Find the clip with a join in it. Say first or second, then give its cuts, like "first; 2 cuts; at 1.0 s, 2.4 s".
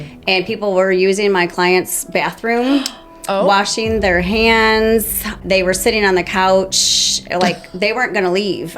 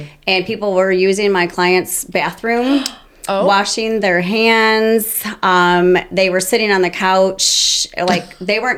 first; 1 cut; at 5.4 s